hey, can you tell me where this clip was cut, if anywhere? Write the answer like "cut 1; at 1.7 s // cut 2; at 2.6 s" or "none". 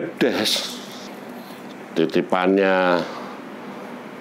cut 1; at 1.0 s